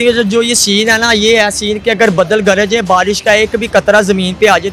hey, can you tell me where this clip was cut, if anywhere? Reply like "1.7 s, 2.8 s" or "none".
none